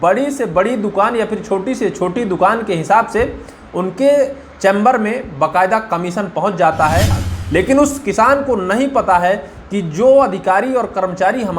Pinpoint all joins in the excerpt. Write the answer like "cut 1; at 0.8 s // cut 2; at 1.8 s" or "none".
cut 1; at 7.2 s